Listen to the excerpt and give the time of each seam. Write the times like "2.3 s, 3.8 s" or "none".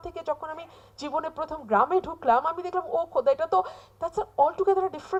none